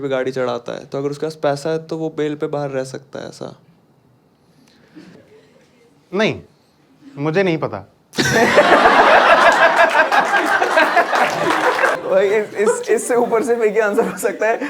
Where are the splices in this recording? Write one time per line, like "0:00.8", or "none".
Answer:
0:05.2
0:11.9

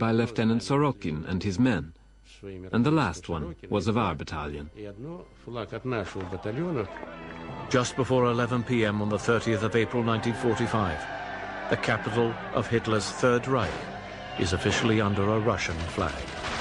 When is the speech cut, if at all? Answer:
0:05.9

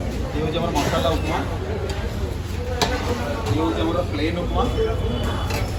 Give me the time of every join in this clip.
none

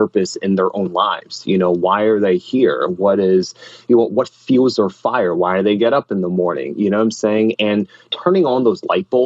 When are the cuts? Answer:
0:08.1

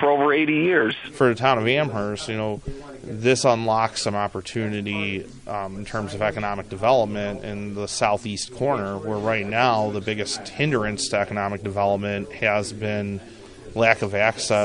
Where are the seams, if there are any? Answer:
0:01.0

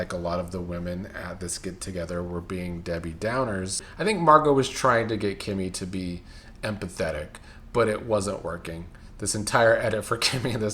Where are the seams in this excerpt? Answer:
0:03.9

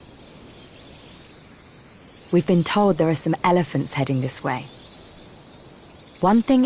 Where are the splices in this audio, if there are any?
none

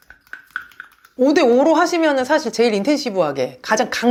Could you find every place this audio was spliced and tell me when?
none

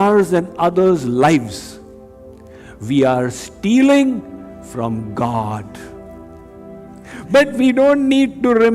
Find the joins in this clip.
0:07.0

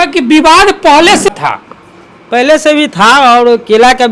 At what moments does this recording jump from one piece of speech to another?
0:01.3

